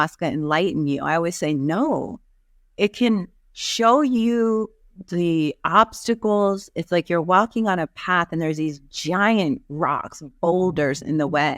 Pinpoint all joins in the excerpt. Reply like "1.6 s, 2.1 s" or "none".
none